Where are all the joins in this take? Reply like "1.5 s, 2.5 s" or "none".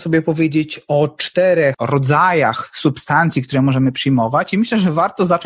1.8 s